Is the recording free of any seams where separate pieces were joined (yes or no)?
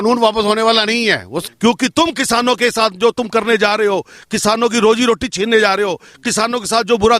no